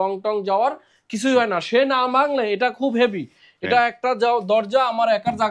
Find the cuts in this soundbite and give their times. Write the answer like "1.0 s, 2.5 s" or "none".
none